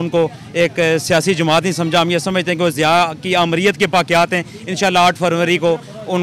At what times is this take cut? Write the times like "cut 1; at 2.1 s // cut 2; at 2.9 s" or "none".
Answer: none